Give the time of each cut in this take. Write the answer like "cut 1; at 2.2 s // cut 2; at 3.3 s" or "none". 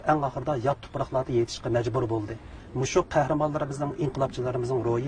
cut 1; at 2.6 s